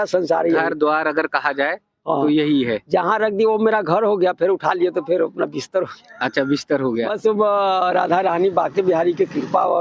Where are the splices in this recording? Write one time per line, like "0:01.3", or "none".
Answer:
0:07.2